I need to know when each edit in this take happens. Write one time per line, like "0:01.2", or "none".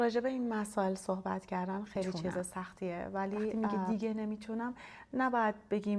0:03.5